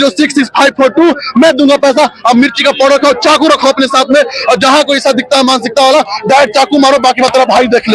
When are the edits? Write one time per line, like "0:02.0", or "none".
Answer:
none